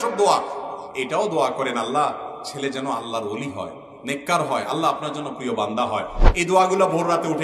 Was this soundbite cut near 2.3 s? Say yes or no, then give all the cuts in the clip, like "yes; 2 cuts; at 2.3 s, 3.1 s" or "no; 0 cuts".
no; 1 cut; at 6.2 s